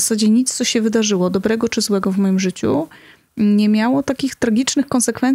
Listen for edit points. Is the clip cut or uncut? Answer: uncut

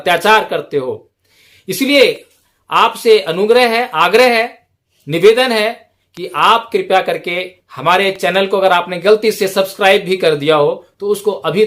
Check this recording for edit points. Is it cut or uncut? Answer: uncut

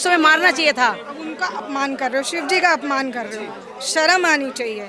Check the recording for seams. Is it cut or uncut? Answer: uncut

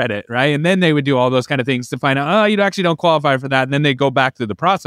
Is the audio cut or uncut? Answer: uncut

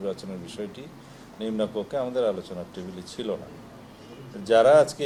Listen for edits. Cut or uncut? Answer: uncut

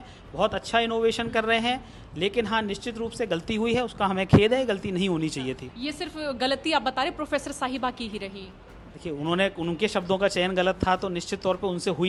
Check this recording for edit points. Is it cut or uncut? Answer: uncut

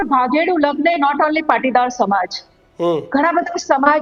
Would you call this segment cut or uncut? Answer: uncut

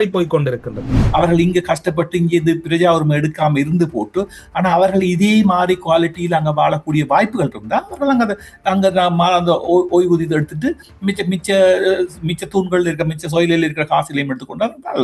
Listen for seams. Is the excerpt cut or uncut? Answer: cut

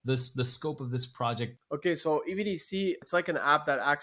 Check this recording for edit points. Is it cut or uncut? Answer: cut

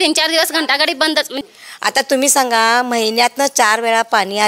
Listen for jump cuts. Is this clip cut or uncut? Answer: cut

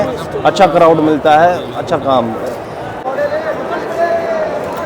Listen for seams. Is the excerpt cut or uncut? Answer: cut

